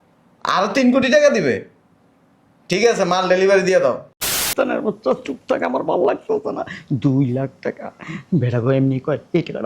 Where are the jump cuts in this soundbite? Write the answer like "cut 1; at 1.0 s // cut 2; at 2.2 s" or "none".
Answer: cut 1; at 4.5 s